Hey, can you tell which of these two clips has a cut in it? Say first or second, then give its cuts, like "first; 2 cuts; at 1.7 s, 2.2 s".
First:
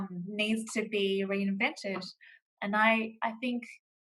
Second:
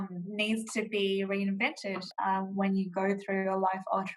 second; 1 cut; at 2.1 s